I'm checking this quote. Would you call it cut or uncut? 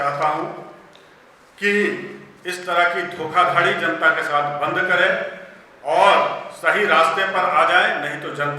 uncut